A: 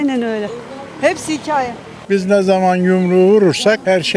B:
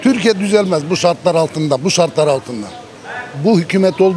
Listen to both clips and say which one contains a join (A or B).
A